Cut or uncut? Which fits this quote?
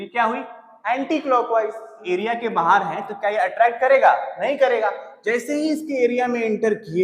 cut